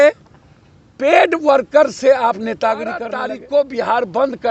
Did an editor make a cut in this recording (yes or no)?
yes